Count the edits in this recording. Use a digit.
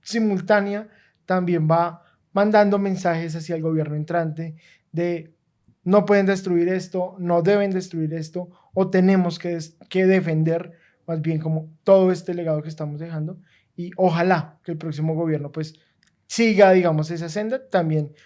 0